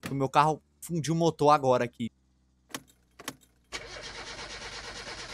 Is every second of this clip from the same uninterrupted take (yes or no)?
yes